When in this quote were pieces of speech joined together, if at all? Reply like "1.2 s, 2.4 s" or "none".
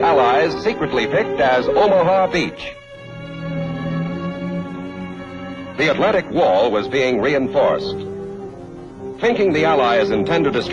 1.9 s